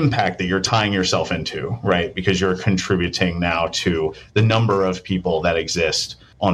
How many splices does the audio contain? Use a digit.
0